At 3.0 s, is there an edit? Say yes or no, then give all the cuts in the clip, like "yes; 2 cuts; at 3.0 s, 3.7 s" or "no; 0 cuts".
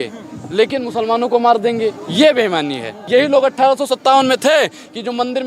yes; 1 cut; at 3.0 s